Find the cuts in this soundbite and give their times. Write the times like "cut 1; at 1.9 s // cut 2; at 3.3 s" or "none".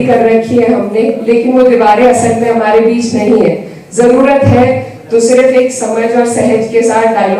none